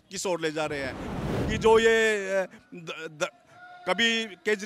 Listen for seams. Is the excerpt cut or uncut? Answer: cut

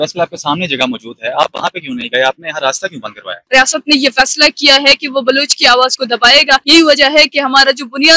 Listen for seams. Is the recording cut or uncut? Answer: cut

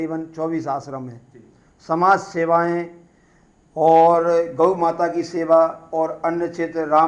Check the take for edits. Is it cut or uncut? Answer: uncut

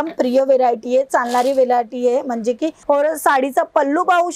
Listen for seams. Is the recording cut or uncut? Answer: cut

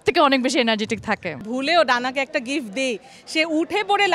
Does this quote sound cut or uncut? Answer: cut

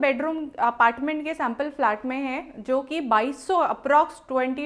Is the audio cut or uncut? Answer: uncut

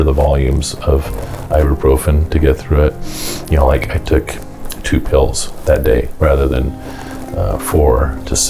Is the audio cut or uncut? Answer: uncut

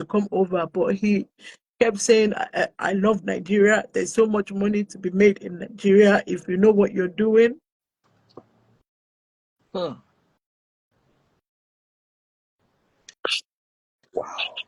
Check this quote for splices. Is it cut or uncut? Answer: uncut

